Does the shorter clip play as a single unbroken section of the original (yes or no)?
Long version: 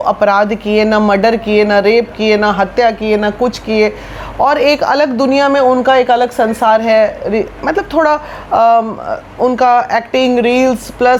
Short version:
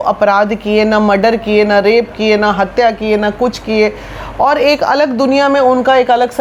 yes